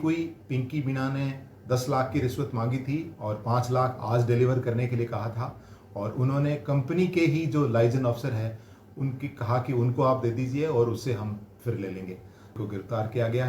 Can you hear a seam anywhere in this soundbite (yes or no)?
yes